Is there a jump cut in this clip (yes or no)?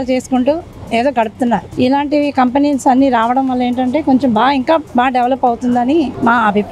no